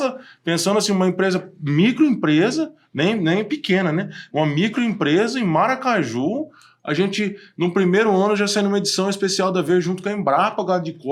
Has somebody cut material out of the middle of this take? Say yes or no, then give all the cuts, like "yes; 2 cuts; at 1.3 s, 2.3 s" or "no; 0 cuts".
no; 0 cuts